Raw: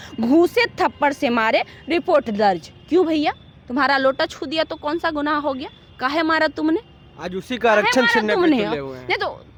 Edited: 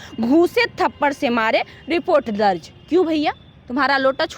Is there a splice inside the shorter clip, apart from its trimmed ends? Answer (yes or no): no